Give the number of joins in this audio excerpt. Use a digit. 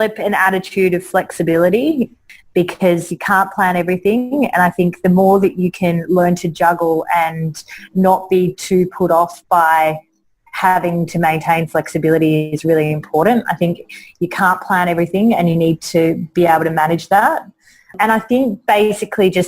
2